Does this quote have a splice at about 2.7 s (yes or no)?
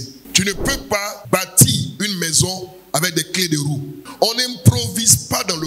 no